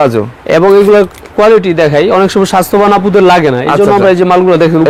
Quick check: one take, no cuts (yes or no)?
yes